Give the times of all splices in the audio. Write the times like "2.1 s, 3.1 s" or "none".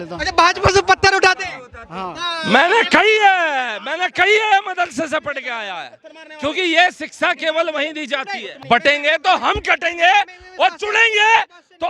8.5 s

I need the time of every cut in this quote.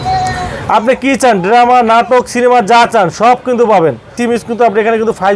4.1 s

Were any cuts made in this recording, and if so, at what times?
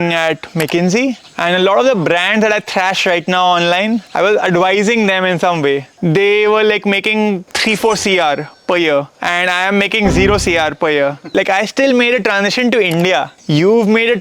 1.3 s, 4.1 s, 5.9 s, 7.5 s, 9.2 s, 11.3 s, 13.4 s

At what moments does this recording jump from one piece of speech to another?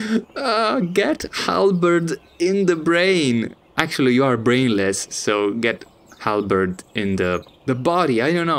7.5 s

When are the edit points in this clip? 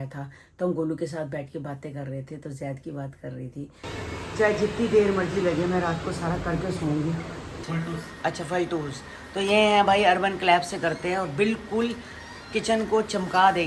3.9 s, 7.6 s

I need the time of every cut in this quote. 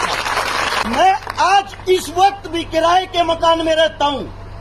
1.0 s

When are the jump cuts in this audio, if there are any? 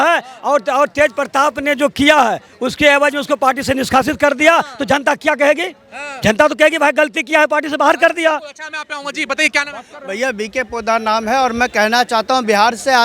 none

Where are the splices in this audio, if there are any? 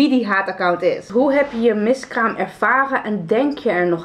1.1 s

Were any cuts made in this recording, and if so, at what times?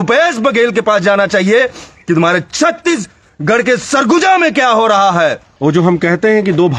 5.5 s

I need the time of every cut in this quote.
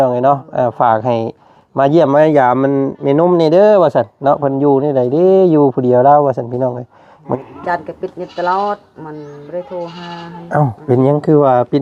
7.4 s

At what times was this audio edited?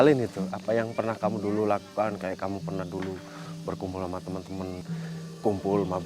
4.8 s

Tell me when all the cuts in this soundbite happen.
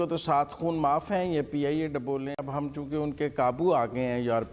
2.4 s

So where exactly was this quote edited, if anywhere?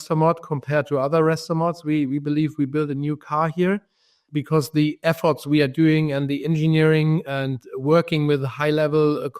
4.2 s

